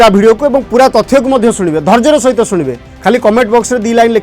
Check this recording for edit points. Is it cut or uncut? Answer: uncut